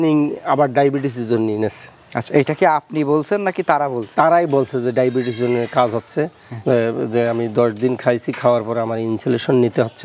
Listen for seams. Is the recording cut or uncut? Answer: uncut